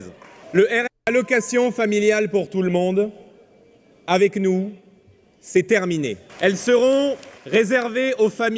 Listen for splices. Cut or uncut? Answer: cut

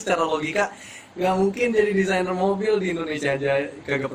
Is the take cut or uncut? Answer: uncut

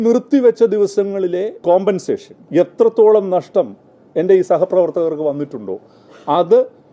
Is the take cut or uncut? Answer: cut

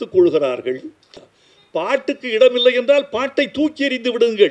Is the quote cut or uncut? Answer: cut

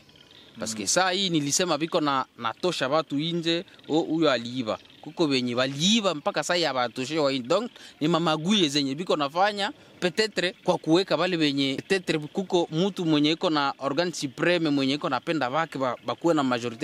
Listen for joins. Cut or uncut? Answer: cut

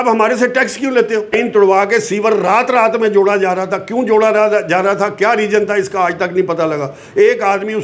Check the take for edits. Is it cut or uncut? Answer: cut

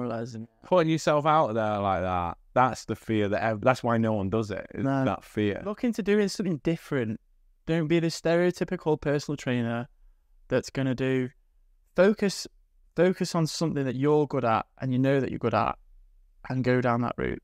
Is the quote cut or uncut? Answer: cut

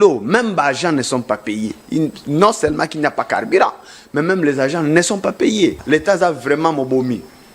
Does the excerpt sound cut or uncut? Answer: cut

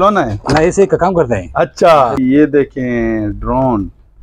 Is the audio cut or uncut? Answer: cut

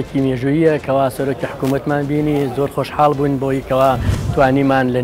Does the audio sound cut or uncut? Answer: uncut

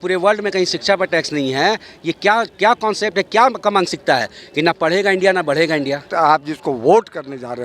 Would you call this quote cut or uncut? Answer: cut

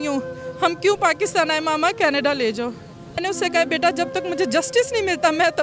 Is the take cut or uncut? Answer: cut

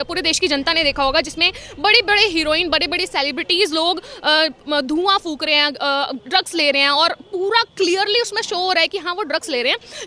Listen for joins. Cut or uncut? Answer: uncut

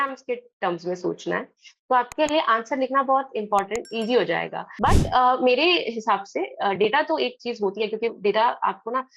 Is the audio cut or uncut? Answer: cut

